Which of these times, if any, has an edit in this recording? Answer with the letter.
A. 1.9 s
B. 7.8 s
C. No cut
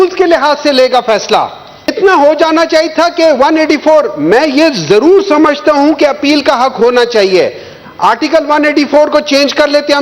A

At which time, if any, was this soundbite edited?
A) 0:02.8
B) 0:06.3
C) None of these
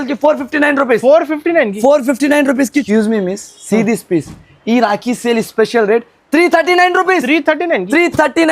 A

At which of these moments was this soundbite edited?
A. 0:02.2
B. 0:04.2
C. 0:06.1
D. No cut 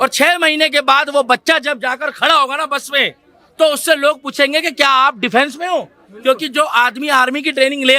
D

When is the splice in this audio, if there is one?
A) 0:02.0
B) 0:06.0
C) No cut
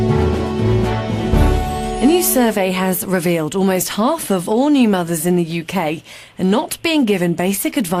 A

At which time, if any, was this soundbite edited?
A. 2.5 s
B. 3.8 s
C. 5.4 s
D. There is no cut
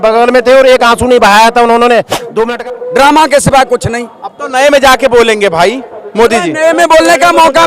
A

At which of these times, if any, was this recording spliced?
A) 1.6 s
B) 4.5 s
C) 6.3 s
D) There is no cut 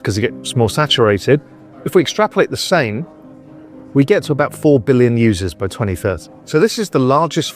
C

